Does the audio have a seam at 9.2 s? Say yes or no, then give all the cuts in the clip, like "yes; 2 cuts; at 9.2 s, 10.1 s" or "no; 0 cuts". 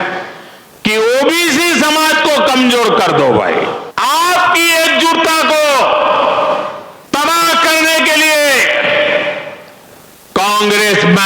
no; 2 cuts; at 3.9 s, 6.9 s